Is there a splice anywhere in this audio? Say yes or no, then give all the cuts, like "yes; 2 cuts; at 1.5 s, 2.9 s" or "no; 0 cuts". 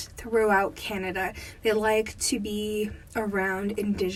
no; 0 cuts